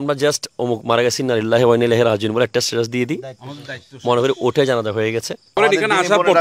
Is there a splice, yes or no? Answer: yes